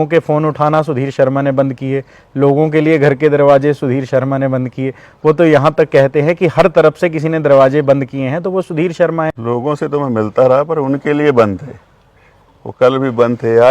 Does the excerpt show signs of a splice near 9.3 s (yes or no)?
yes